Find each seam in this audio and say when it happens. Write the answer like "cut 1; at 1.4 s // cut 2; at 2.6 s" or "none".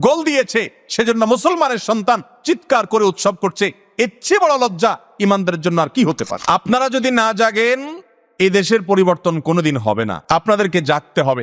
cut 1; at 6.3 s // cut 2; at 10.2 s

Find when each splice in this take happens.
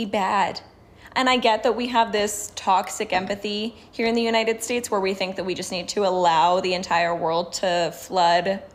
none

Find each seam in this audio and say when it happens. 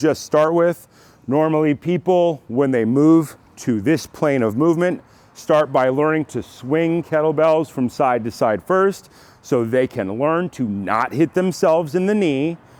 none

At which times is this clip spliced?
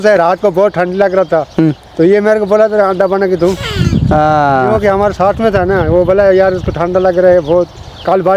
none

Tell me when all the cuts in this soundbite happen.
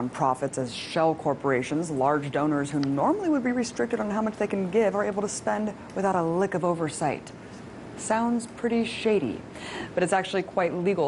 cut 1; at 3.6 s

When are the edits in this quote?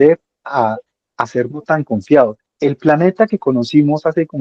cut 1; at 2.4 s

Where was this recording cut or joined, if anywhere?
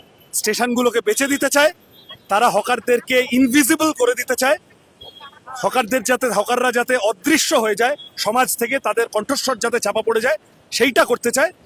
none

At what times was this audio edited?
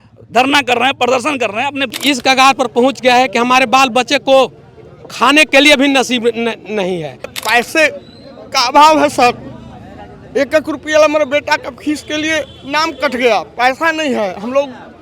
cut 1; at 1.9 s // cut 2; at 7.3 s

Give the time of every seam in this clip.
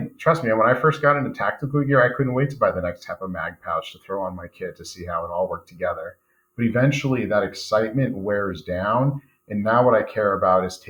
none

